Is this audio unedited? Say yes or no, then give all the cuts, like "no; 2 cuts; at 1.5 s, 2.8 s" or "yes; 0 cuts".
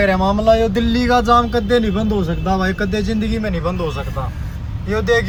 yes; 0 cuts